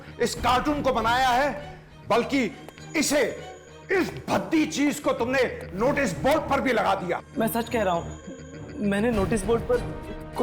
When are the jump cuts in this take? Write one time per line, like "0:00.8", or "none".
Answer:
0:07.3